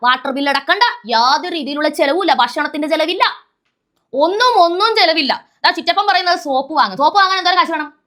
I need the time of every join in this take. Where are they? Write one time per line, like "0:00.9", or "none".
none